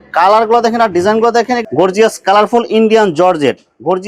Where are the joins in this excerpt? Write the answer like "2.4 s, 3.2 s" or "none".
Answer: 1.6 s